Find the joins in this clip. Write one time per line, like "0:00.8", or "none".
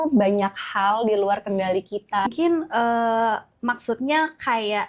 0:02.2